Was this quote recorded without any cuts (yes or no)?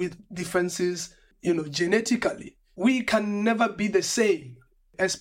no